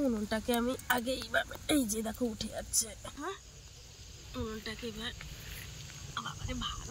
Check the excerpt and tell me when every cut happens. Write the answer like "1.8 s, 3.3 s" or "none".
3.1 s